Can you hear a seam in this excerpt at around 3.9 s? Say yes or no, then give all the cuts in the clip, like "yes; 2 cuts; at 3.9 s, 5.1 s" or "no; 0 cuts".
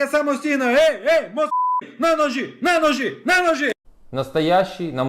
yes; 1 cut; at 3.9 s